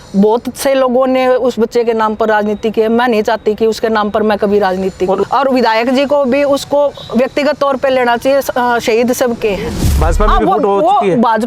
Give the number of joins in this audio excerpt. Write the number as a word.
two